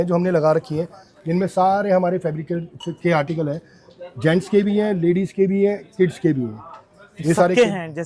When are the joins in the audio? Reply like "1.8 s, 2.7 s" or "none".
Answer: none